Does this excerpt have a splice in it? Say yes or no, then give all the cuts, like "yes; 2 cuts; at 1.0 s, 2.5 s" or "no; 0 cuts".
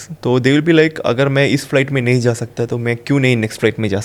no; 0 cuts